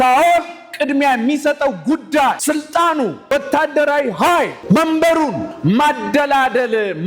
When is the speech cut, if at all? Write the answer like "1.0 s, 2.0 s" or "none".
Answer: 2.4 s, 3.3 s, 4.6 s, 5.5 s

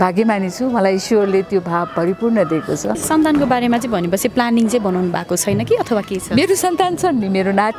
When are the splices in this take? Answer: 3.0 s

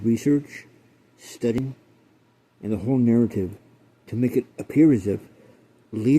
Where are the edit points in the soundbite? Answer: 1.6 s

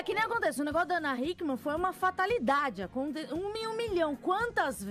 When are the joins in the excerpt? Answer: 3.2 s

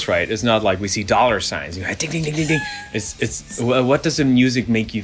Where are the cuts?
none

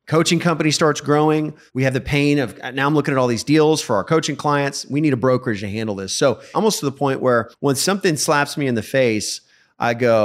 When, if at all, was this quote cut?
1.6 s, 6.5 s, 7.5 s

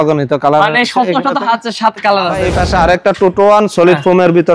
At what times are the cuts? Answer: 2.5 s

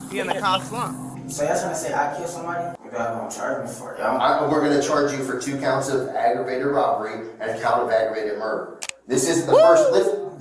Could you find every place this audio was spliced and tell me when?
2.8 s

